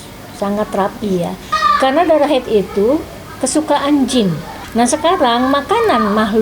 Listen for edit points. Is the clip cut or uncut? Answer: cut